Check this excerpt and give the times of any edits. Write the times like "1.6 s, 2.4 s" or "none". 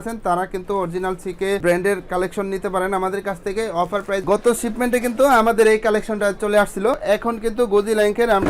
4.2 s, 7.0 s